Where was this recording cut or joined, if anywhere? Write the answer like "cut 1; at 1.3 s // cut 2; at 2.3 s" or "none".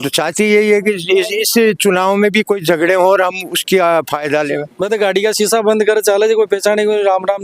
cut 1; at 4.7 s